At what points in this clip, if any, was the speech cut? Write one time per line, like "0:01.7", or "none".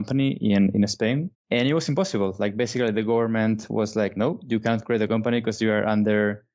0:01.3